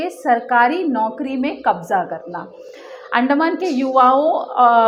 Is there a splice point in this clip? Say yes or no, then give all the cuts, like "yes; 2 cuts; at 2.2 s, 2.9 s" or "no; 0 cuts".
no; 0 cuts